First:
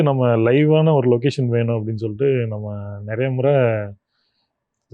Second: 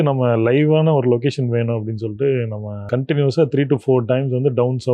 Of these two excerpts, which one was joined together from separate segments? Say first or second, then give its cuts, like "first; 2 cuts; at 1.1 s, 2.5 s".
second; 1 cut; at 2.8 s